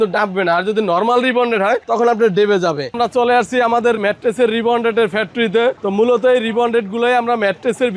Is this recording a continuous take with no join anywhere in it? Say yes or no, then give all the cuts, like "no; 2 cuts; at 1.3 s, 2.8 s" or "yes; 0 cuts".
no; 3 cuts; at 2.9 s, 4.0 s, 5.8 s